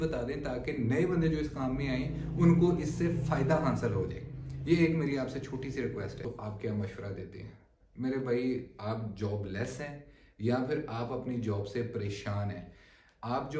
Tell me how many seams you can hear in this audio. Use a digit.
1